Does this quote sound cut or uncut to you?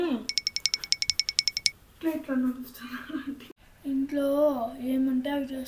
cut